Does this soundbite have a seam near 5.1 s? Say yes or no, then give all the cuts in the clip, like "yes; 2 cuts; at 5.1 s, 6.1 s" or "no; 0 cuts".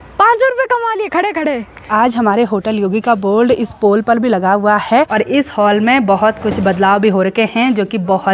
yes; 2 cuts; at 1.9 s, 5.1 s